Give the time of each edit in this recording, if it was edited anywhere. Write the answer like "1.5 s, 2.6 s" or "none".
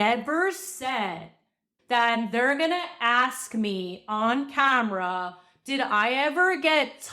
1.7 s